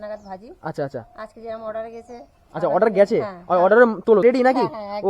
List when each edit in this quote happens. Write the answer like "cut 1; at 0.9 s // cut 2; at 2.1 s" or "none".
cut 1; at 4.2 s